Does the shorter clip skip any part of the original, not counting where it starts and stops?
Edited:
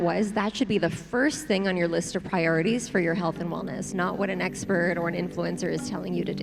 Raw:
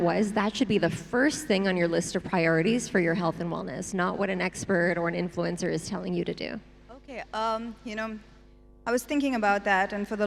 no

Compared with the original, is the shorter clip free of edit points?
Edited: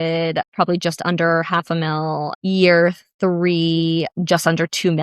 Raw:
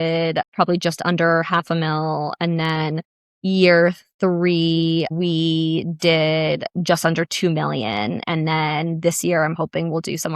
no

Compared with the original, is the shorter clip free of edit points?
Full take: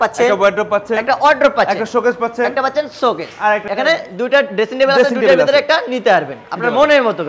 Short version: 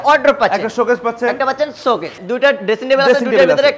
no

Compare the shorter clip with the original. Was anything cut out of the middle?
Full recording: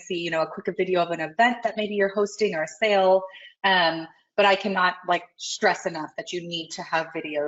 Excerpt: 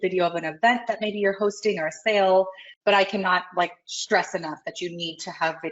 yes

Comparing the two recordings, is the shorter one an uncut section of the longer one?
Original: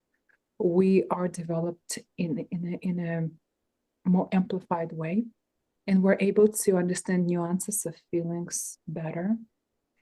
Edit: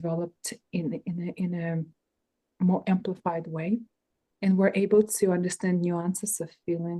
yes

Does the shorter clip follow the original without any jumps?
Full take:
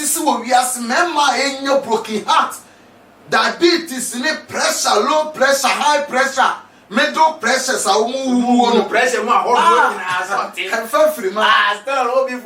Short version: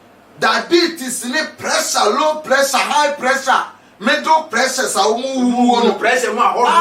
yes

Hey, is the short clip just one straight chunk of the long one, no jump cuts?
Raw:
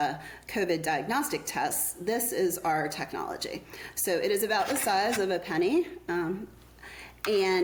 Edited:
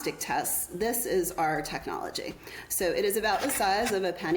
yes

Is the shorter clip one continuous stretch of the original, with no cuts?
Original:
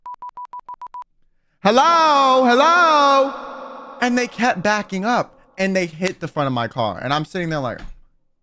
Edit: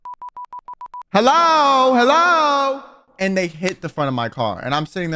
no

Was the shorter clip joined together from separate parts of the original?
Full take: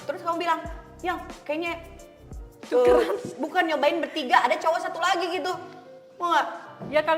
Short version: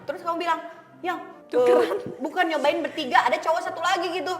yes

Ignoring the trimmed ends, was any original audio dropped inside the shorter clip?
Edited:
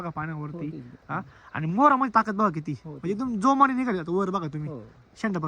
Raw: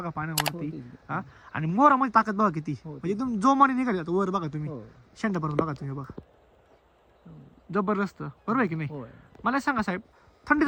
no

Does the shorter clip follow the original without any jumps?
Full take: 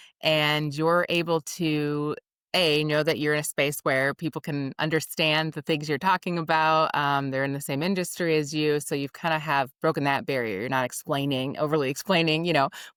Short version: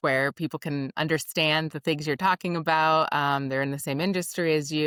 yes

